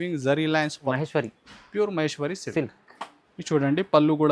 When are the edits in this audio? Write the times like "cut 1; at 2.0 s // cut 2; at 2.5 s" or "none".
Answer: cut 1; at 0.9 s